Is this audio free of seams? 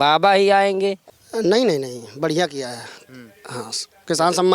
no; 1 cut; at 1.1 s

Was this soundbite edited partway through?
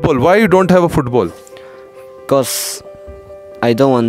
no; 0 cuts

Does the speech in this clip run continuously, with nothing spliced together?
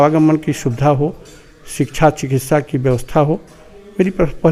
yes; 0 cuts

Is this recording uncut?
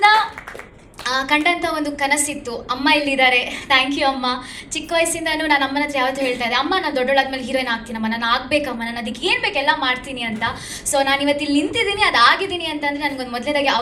yes; 0 cuts

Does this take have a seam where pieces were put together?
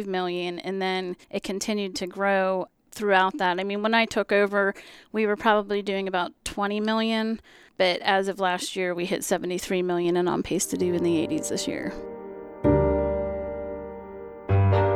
yes; 1 cut; at 12.5 s

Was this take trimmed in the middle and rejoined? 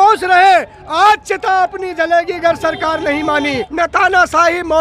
yes; 1 cut; at 3.7 s

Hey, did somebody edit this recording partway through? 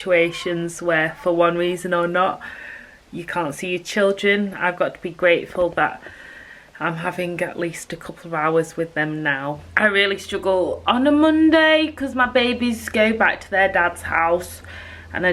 yes; 1 cut; at 9.7 s

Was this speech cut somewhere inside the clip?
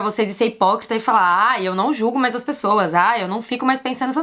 no; 0 cuts

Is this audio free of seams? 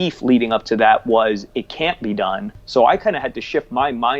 no; 1 cut; at 2.5 s

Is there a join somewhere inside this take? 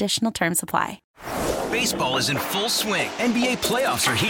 yes; 1 cut; at 1.0 s

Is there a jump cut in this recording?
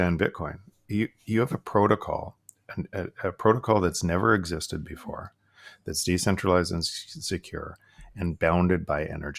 no; 0 cuts

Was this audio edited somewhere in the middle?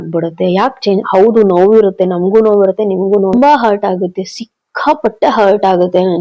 yes; 1 cut; at 3.3 s

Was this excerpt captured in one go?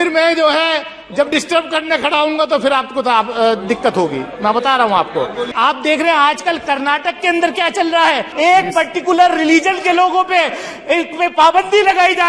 no; 2 cuts; at 5.5 s, 8.3 s

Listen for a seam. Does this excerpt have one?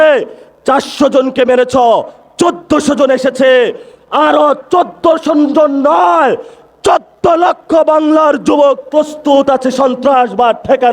no; 0 cuts

